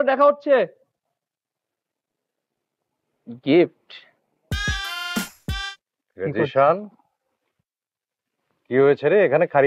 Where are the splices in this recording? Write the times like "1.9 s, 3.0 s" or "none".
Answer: 5.7 s